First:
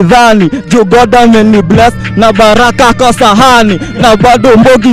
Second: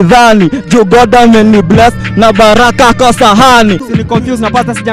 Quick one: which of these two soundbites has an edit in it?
second; 1 cut; at 3.8 s

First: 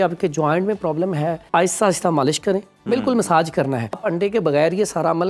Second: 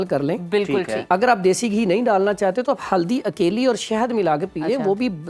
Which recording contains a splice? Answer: first; 2 cuts; at 1.4 s, 4.0 s

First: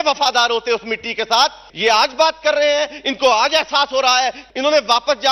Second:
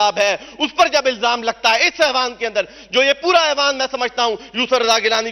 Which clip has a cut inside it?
first; 2 cuts; at 1.7 s, 4.4 s

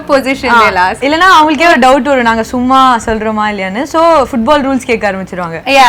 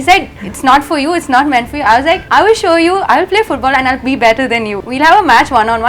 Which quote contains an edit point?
second; 2 cuts; at 2.2 s, 4.8 s

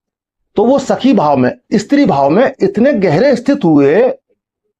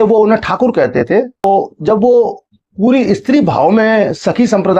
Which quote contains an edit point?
second; 1 cut; at 1.4 s

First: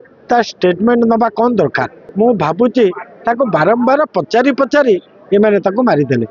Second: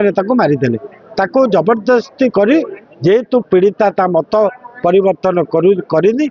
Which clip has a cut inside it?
first; 1 cut; at 2.0 s

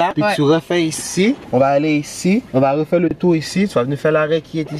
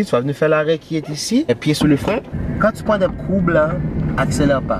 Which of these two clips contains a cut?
second; 1 cut; at 2.4 s

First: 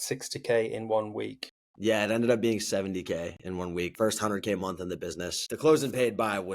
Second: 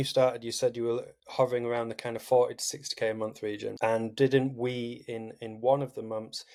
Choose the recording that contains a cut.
first; 2 cuts; at 3.9 s, 5.5 s

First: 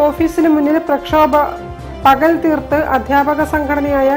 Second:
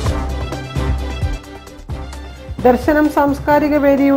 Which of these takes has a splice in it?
second; 1 cut; at 2.3 s

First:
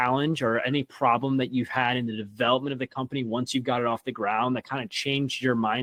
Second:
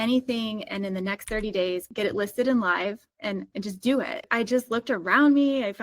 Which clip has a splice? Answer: second; 3 cuts; at 1.9 s, 3.1 s, 4.3 s

